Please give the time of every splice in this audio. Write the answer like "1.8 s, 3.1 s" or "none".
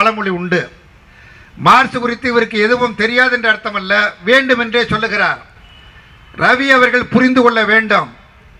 none